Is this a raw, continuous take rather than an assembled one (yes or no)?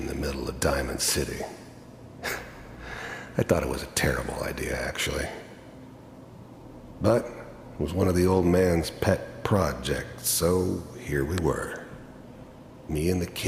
yes